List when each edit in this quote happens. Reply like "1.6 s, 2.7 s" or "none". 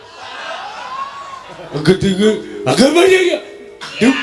1.7 s